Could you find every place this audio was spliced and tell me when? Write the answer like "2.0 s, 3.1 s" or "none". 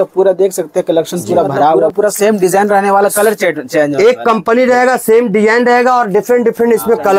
1.9 s